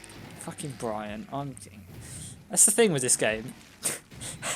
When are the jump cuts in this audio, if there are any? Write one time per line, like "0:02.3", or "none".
none